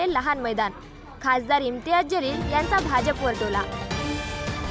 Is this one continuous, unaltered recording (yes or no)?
no